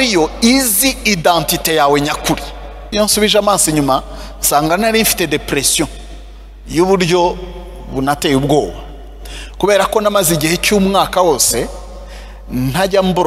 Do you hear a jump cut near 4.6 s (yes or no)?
no